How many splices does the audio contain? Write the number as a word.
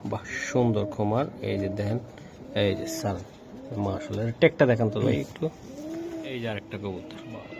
one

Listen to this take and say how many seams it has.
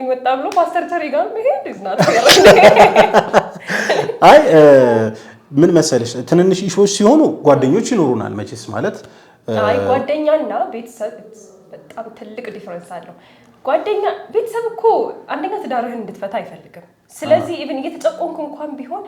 zero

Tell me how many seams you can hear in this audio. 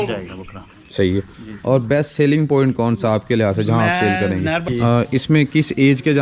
one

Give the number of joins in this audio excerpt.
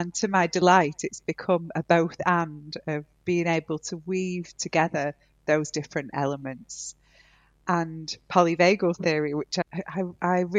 one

